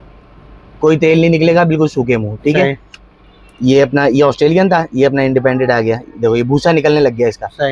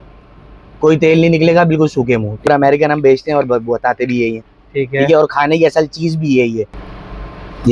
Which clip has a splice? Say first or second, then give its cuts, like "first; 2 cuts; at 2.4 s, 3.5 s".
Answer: second; 2 cuts; at 2.5 s, 6.8 s